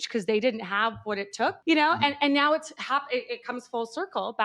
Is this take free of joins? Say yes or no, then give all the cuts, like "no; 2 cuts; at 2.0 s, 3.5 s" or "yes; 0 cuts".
yes; 0 cuts